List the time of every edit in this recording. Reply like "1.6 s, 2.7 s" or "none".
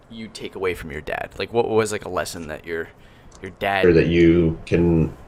none